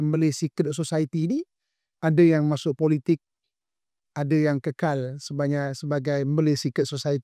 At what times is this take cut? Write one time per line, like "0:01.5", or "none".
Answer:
none

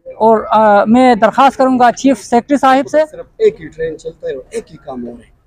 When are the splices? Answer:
0:03.2

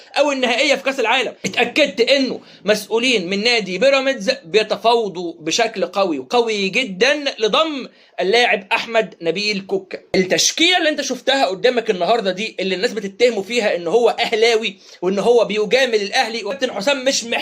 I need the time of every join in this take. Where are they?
0:01.4
0:10.0
0:16.5

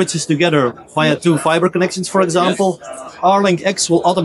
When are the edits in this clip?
none

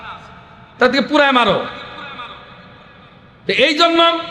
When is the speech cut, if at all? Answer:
none

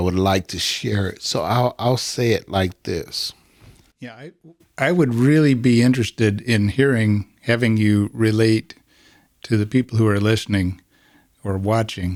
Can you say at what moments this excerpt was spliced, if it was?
none

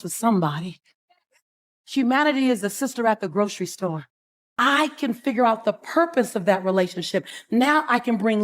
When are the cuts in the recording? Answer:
0:04.5

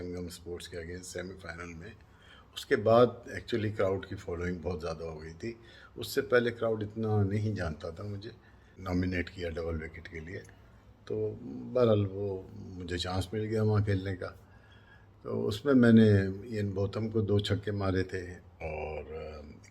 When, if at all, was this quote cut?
0:08.7

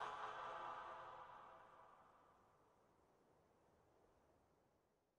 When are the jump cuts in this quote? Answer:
0:00.9

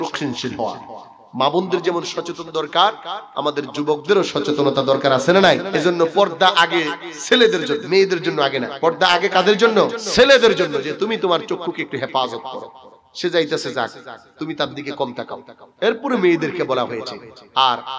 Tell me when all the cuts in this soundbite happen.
0:05.7
0:07.8
0:08.7
0:10.0

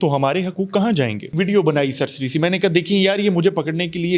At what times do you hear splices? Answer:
0:01.3

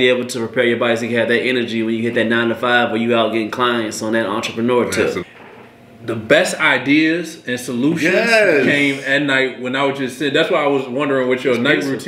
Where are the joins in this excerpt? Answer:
0:05.2

